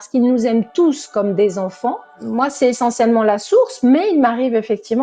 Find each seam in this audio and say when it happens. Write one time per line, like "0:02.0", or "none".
0:02.1

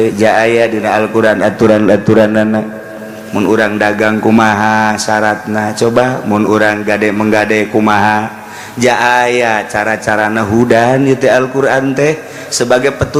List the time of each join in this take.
none

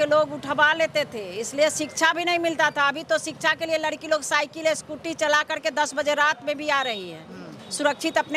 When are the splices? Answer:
none

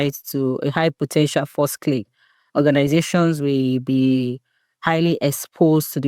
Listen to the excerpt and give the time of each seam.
none

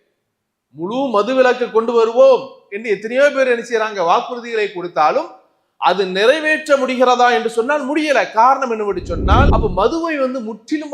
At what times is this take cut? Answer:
0:09.5

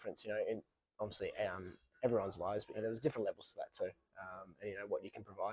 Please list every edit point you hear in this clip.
0:02.8

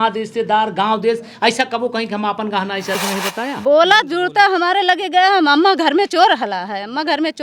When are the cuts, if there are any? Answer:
0:03.0

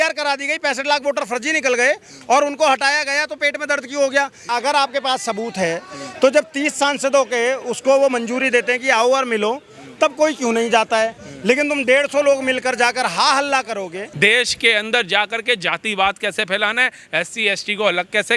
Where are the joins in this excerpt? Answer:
0:04.4
0:14.0

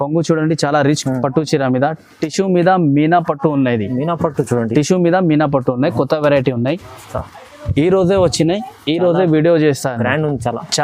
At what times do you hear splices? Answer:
0:00.9

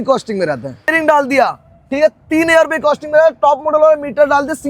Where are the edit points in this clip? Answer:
0:00.9

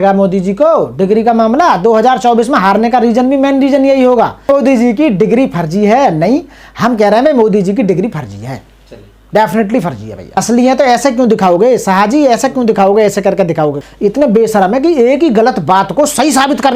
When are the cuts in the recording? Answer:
0:04.5
0:10.2
0:13.8

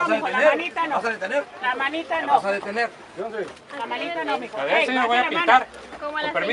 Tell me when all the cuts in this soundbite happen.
none

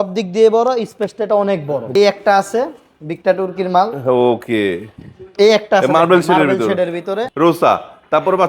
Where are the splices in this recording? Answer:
0:01.9
0:07.2

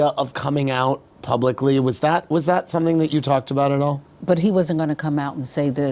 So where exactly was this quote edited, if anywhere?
0:04.1

